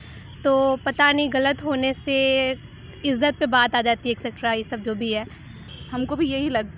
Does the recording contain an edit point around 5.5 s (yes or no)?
yes